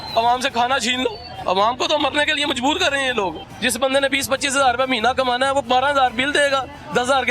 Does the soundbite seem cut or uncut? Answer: cut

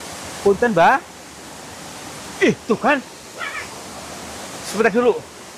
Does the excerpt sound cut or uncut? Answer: uncut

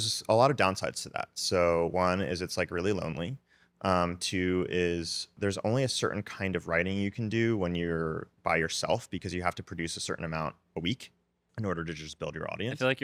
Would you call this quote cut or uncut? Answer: uncut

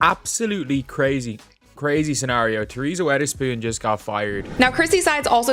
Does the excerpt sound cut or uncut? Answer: cut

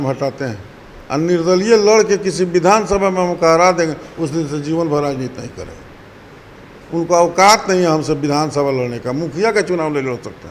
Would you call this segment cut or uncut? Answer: uncut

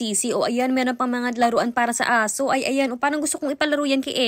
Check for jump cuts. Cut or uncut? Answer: uncut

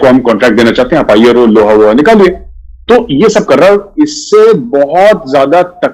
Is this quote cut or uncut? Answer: uncut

